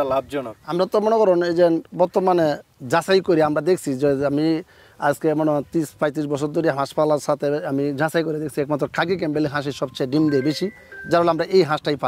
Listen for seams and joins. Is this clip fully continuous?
yes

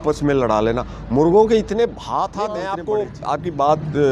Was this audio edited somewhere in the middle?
yes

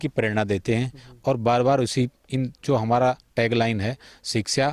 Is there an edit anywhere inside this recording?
no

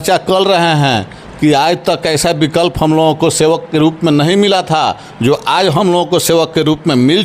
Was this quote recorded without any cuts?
yes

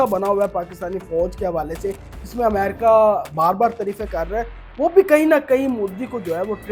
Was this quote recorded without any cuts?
yes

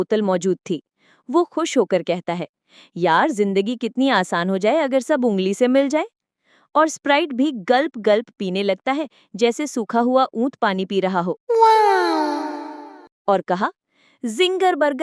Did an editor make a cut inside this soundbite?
yes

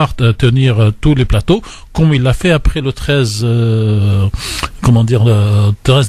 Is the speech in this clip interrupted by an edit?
no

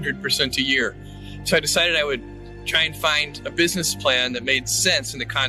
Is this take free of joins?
yes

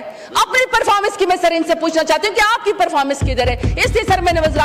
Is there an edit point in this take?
no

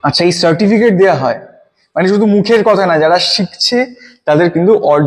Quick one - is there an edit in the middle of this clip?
no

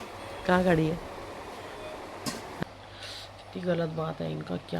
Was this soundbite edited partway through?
yes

